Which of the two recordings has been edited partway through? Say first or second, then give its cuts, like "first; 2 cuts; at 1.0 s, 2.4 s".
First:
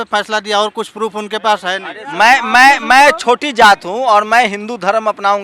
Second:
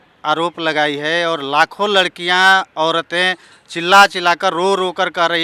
first; 1 cut; at 1.9 s